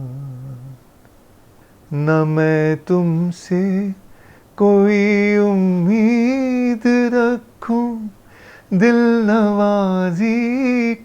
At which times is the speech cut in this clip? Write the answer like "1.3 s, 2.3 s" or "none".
1.6 s